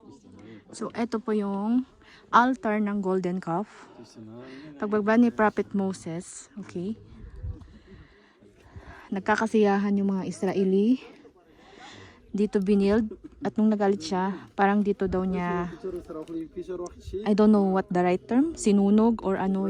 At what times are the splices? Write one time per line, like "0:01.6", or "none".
none